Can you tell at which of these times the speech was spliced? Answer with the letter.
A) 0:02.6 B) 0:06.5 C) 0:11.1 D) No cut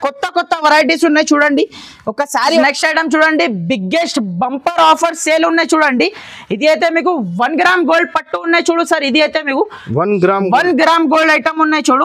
A